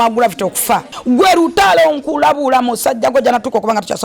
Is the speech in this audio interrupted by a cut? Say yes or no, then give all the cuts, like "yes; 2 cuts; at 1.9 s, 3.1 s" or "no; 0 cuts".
yes; 1 cut; at 0.9 s